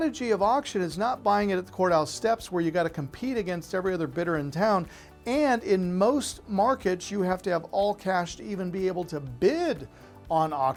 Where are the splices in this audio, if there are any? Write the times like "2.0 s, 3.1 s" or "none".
none

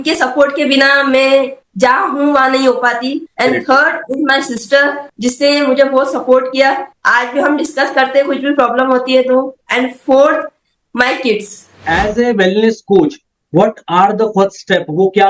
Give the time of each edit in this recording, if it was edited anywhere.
11.8 s

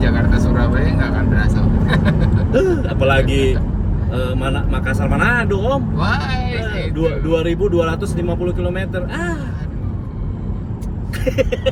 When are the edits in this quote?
none

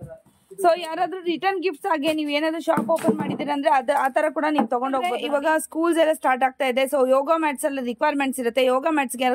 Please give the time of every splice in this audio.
5.0 s

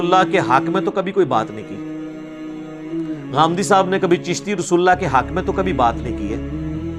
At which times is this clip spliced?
none

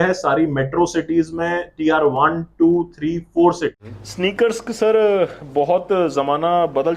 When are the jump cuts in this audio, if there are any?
3.8 s

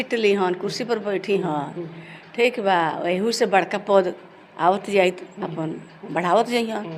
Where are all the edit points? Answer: none

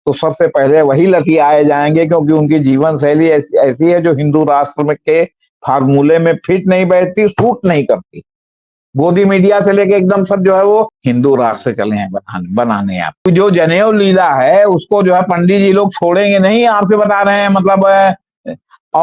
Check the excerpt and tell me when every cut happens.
8.8 s, 13.2 s

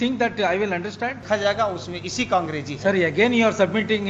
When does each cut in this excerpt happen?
1.2 s

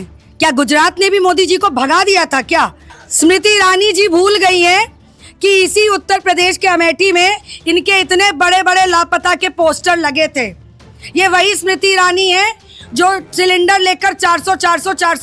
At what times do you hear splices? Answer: 2.9 s

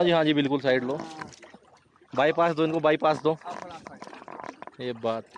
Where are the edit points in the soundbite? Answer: none

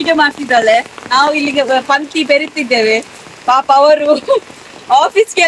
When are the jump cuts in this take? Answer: none

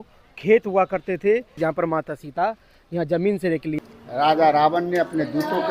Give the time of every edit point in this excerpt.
1.5 s, 3.8 s

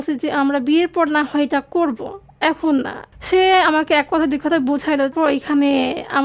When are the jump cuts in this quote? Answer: 3.0 s, 5.1 s

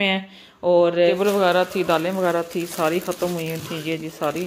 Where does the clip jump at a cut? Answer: 1.1 s

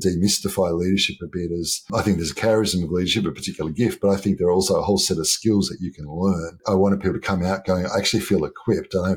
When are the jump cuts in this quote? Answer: 1.9 s, 6.6 s

